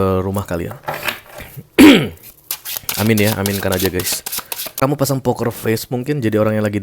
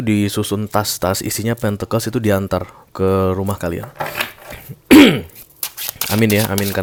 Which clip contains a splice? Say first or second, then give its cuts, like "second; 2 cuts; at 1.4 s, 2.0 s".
first; 1 cut; at 4.8 s